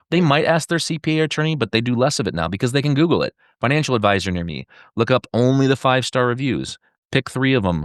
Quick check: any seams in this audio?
no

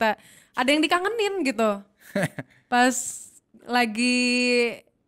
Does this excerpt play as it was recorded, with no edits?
yes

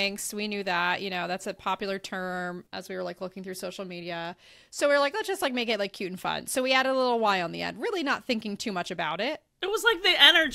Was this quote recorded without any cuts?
no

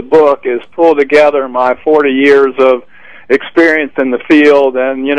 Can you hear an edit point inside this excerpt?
yes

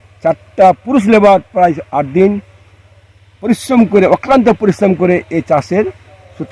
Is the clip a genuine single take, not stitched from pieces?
yes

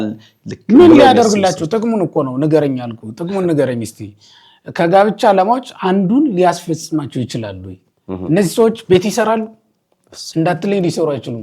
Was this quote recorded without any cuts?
yes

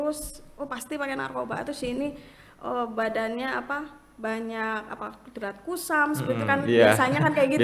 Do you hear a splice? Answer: no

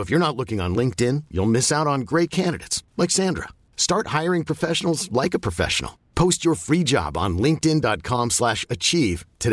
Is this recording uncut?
yes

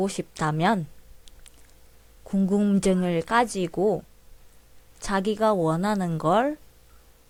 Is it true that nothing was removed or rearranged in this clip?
yes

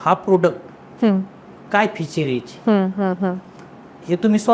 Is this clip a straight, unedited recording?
yes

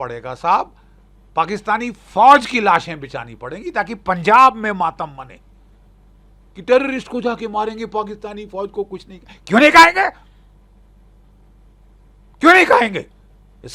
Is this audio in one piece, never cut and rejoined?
yes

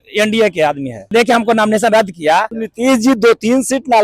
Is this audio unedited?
no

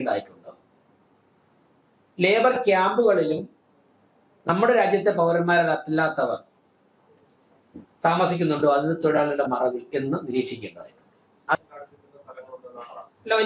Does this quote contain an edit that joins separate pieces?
yes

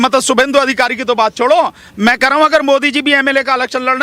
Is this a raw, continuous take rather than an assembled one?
yes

